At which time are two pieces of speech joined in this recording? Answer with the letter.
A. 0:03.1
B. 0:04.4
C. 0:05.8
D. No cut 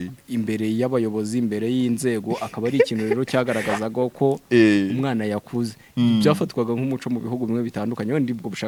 D